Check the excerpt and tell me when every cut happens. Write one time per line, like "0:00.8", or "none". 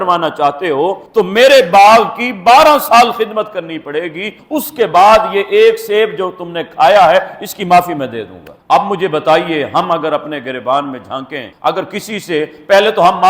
none